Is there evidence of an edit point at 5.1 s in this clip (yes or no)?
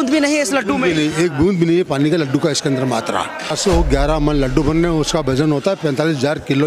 no